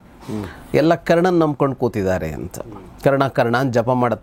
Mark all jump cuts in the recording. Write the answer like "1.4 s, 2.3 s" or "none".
none